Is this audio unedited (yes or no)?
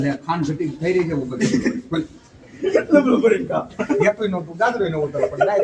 yes